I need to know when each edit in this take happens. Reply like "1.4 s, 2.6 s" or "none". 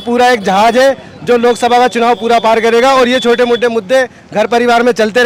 none

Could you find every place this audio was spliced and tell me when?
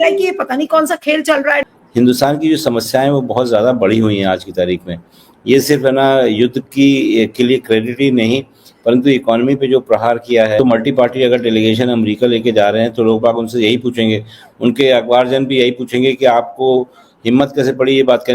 1.8 s

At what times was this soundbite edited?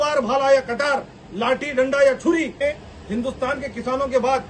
2.6 s

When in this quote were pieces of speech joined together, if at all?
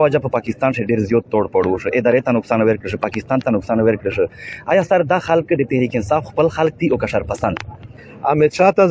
8.0 s

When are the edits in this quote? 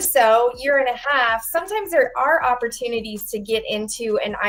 none

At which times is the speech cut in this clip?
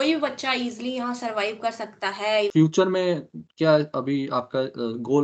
2.5 s

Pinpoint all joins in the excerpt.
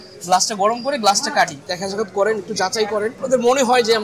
1.7 s, 3.2 s

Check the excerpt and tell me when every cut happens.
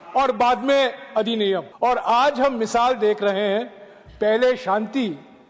1.7 s

